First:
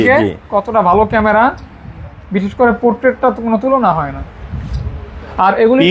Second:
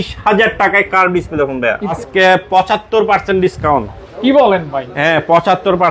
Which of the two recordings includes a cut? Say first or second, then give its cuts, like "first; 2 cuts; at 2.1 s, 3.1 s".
second; 1 cut; at 2.0 s